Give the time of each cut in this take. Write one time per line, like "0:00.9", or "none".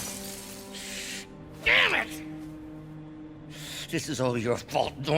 none